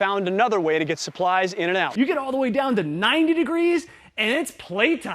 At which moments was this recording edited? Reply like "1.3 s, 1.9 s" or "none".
1.9 s

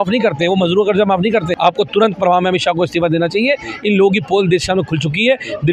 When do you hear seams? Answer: 1.5 s

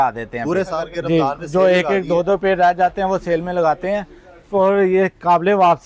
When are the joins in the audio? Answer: none

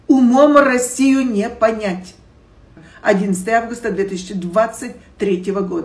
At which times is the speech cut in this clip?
2.8 s

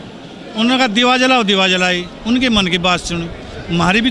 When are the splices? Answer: none

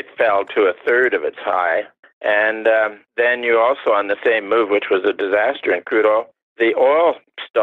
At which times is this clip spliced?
1.5 s

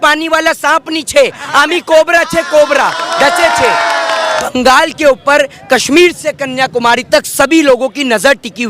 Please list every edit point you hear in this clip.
3.1 s, 4.4 s

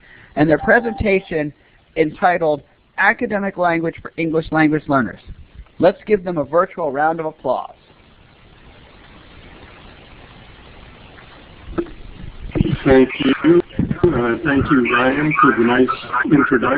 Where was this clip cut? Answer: none

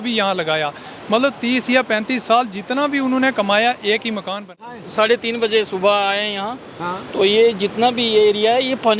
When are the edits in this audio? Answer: 4.5 s

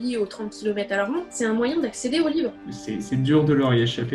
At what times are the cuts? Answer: 1.3 s, 2.6 s

